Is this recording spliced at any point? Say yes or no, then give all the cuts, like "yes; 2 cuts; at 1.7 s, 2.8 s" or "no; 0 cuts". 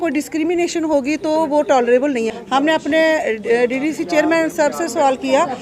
yes; 1 cut; at 2.4 s